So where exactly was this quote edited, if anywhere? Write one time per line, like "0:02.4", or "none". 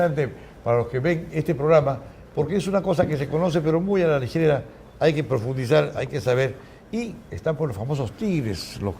0:04.7